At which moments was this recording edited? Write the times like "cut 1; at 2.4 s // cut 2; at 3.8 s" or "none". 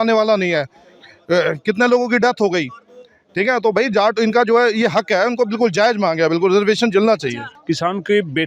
cut 1; at 7.5 s